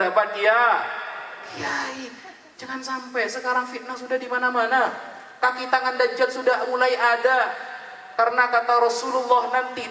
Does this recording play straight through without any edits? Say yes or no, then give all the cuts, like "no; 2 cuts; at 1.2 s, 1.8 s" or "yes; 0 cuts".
yes; 0 cuts